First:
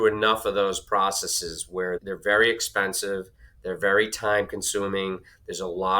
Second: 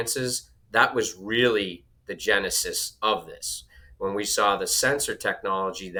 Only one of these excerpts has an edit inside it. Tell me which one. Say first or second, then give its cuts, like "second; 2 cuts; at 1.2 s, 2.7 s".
first; 1 cut; at 2.0 s